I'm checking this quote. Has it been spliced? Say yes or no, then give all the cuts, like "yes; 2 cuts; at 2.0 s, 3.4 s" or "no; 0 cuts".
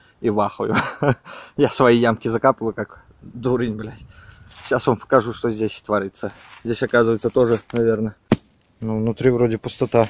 yes; 1 cut; at 8.1 s